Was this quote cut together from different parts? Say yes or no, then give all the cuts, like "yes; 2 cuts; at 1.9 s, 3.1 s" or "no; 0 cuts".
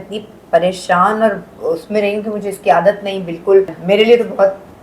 yes; 1 cut; at 3.8 s